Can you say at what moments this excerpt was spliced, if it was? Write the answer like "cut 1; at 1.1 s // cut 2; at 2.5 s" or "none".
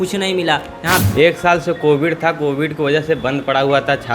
cut 1; at 1.0 s